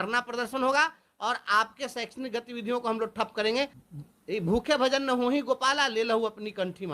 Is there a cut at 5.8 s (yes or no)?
no